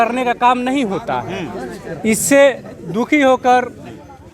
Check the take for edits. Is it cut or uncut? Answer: uncut